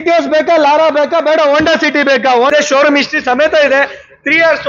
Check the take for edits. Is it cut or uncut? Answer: cut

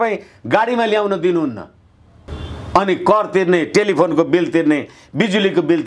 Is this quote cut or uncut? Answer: uncut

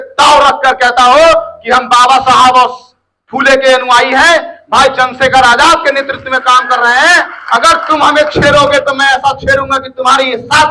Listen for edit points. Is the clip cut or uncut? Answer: uncut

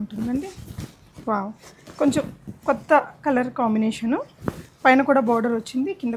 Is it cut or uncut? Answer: uncut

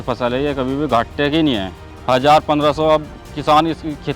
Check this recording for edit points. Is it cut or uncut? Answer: cut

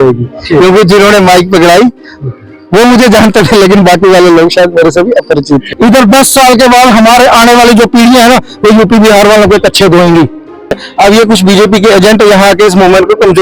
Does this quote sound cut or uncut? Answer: cut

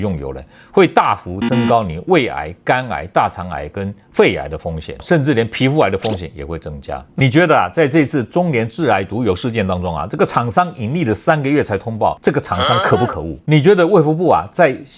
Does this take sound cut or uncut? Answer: cut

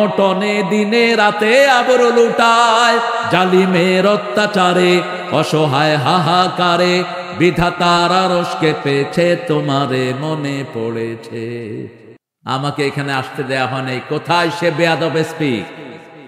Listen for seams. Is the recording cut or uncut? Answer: cut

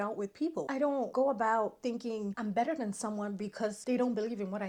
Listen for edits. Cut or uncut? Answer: uncut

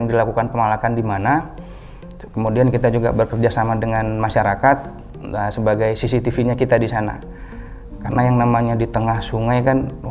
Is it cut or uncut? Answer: uncut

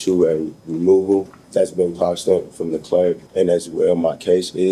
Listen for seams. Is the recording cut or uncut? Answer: cut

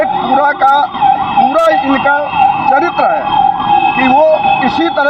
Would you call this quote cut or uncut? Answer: cut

